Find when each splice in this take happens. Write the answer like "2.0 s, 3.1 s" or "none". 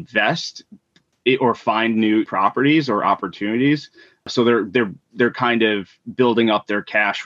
2.3 s, 4.3 s